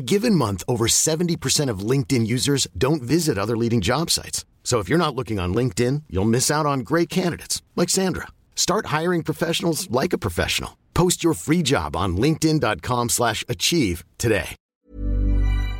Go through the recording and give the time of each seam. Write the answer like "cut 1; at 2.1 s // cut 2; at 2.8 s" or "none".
cut 1; at 14.6 s